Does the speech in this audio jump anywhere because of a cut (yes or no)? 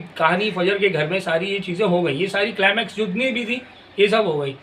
no